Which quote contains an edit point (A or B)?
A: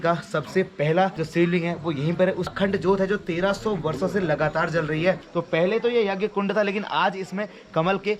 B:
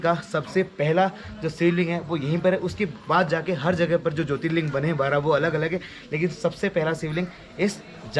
A